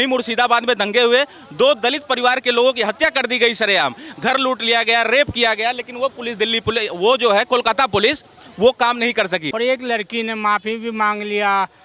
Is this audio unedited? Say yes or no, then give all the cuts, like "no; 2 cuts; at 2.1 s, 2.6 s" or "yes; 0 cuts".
no; 1 cut; at 9.5 s